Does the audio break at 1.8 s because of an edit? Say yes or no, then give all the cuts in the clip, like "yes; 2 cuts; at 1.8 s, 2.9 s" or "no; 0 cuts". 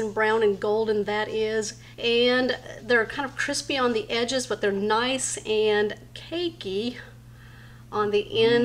yes; 1 cut; at 1.8 s